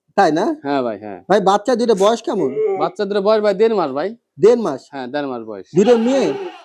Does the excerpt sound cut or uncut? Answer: uncut